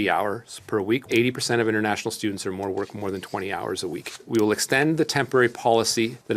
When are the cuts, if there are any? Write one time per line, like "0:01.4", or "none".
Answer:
0:01.0
0:04.2

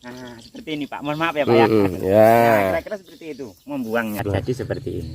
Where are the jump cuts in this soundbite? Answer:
0:04.2

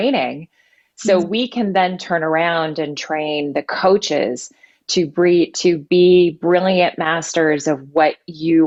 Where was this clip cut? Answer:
none

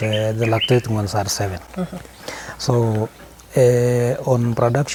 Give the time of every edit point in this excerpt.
none

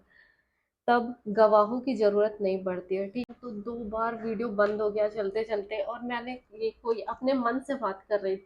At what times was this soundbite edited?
0:03.3

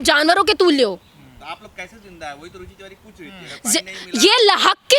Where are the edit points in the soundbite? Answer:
none

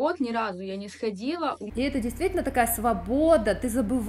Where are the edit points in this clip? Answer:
0:01.6

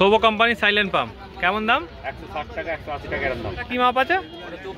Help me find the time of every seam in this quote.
0:03.6

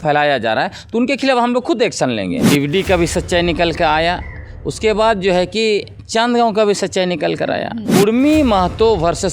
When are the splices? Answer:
0:02.4
0:07.8

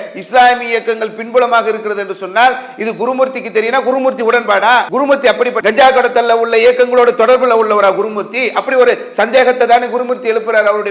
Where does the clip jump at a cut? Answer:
0:05.3

